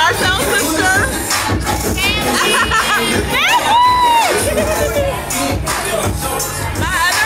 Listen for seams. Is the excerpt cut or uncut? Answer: uncut